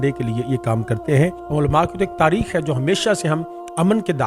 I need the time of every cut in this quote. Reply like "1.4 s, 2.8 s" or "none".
1.4 s

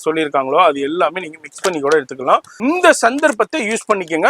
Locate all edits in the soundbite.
2.5 s

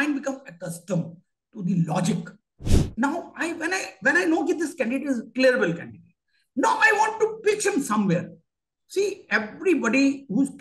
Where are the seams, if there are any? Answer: 2.7 s

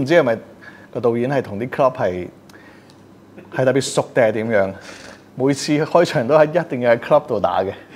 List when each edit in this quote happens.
none

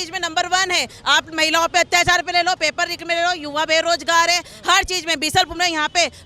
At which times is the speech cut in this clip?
none

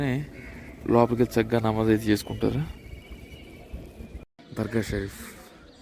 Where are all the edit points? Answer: 4.4 s

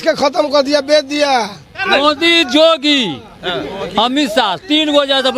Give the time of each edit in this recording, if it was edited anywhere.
1.8 s

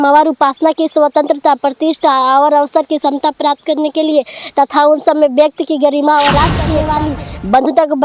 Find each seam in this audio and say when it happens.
6.8 s

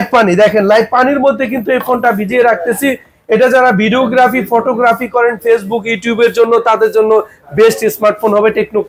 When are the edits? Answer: none

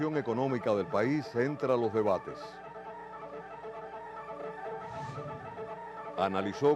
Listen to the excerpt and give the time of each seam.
none

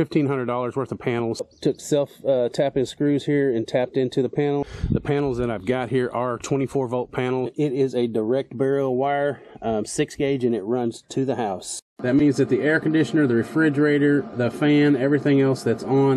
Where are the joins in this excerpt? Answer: 1.4 s, 4.6 s, 7.5 s, 11.9 s

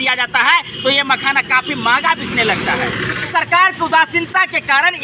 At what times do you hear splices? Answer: 3.1 s

